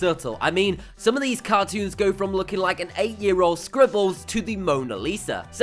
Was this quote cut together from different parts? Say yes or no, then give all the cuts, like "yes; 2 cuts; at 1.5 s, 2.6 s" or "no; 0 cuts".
yes; 1 cut; at 3.4 s